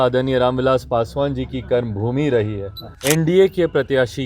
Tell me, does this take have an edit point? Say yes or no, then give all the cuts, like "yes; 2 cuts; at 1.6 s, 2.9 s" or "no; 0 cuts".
yes; 1 cut; at 2.9 s